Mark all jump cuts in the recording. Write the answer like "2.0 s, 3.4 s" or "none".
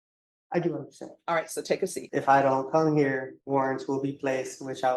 2.0 s, 3.3 s